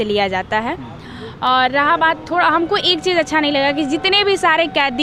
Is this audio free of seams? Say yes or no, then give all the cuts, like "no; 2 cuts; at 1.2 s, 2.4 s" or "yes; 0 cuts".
yes; 0 cuts